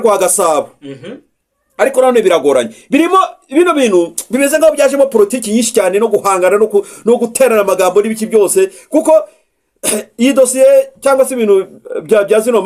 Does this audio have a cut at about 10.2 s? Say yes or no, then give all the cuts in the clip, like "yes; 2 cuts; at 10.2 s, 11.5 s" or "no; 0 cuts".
no; 0 cuts